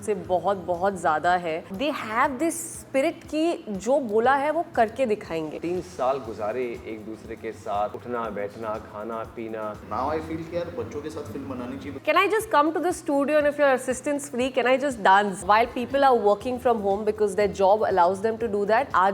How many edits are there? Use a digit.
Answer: 5